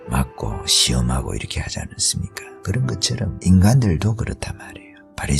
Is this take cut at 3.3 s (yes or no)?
yes